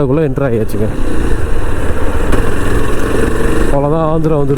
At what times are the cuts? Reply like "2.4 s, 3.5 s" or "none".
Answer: 2.3 s

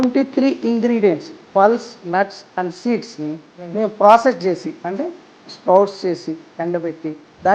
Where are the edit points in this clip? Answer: none

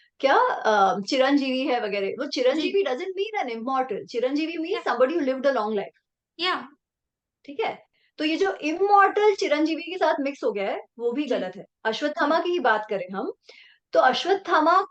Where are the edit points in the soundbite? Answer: none

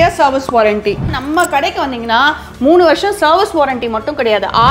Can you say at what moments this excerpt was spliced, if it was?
1.1 s

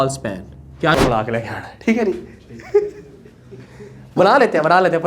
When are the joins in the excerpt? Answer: 0.9 s

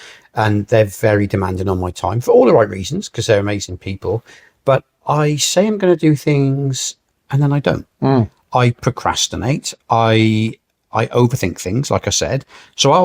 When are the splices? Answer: none

